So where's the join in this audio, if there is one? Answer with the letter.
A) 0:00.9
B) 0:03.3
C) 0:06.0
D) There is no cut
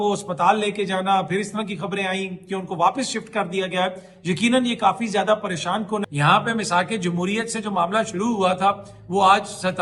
C